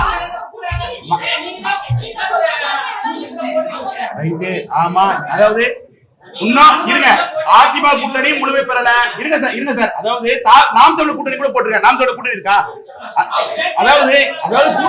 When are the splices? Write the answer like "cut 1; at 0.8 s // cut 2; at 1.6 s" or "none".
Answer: none